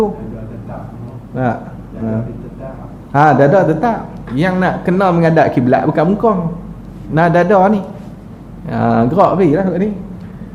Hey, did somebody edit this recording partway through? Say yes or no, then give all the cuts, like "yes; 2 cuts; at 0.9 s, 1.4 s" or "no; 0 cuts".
no; 0 cuts